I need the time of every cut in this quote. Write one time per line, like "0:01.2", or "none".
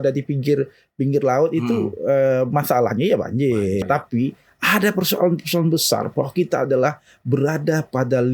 0:03.8